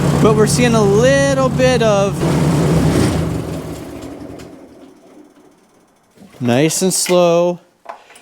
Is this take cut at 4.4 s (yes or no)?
no